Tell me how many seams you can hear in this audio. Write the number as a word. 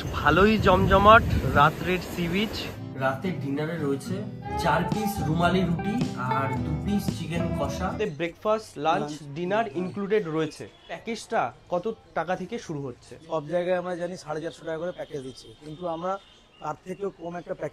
five